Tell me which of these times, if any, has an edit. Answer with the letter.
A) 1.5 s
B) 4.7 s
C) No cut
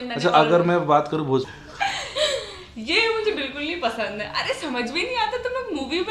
A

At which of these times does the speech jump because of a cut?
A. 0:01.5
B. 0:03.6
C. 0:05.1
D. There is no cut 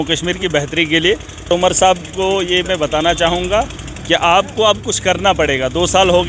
A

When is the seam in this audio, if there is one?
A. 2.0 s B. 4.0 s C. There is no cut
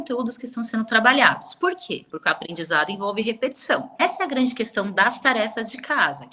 B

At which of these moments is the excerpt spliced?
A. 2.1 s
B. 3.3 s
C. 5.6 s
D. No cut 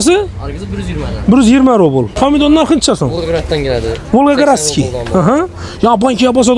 A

